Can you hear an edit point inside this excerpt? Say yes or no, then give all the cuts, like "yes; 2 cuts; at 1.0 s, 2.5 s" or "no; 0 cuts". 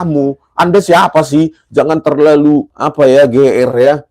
yes; 1 cut; at 2.8 s